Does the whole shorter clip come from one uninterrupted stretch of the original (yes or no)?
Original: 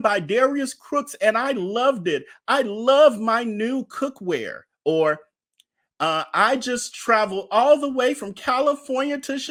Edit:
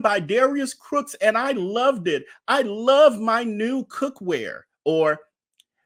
yes